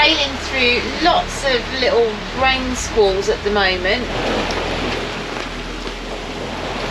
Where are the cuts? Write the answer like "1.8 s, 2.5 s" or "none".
4.1 s